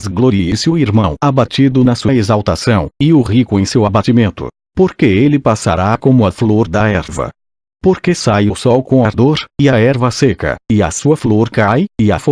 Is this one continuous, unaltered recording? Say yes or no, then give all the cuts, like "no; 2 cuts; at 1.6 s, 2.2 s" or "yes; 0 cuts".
yes; 0 cuts